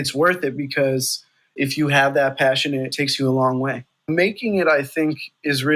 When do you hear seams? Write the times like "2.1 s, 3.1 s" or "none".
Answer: 1.5 s, 2.9 s, 4.1 s